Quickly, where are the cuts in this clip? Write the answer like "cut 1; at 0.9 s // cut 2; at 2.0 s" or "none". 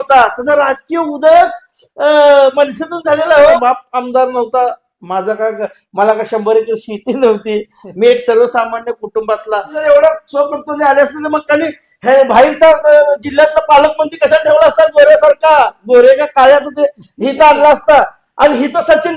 cut 1; at 3.6 s // cut 2; at 9.8 s